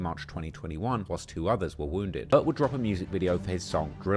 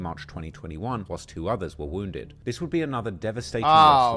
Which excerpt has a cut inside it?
first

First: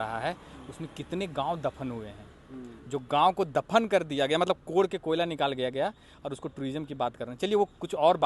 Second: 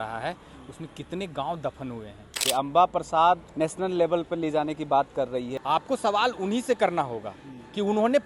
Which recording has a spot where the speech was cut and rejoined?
second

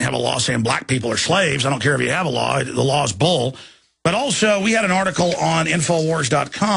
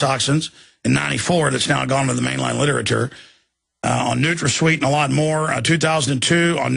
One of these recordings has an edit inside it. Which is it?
first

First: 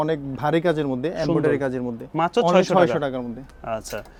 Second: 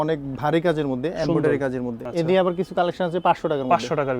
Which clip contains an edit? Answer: second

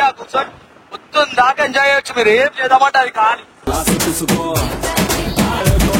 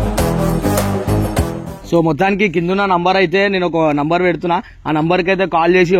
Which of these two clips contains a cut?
second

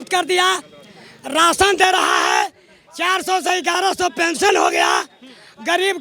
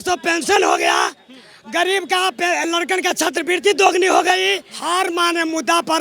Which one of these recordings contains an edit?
second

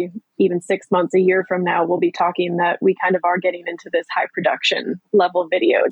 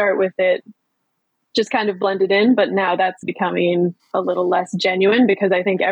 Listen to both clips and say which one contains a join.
second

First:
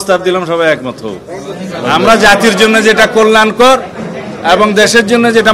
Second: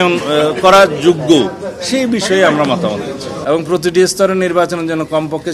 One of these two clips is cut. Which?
second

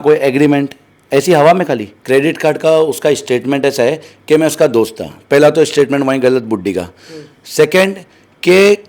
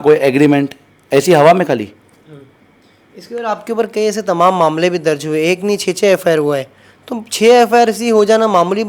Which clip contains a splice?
first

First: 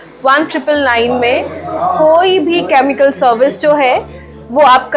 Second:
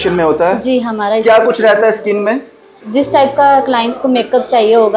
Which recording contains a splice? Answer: second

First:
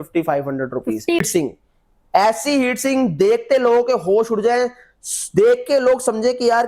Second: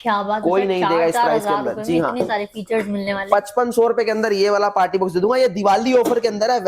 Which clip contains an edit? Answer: first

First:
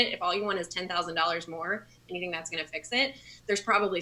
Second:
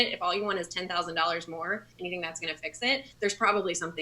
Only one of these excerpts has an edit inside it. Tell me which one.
second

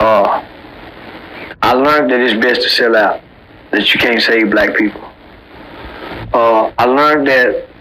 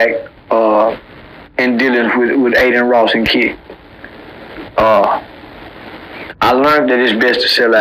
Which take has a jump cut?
first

